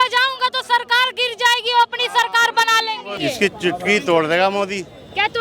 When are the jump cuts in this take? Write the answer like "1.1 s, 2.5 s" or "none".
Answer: 3.1 s